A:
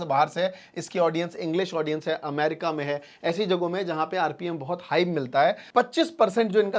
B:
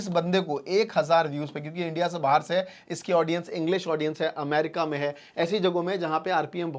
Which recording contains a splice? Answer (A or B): A